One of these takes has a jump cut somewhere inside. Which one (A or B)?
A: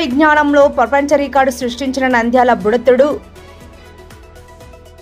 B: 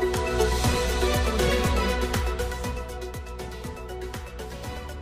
B